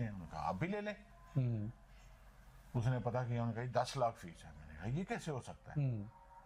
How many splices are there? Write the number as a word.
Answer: zero